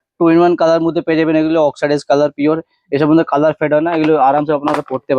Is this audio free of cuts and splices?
yes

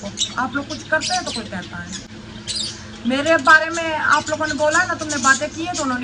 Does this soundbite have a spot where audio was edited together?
no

